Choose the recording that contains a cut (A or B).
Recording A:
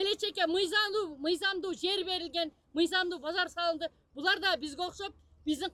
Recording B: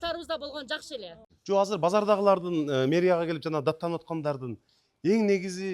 B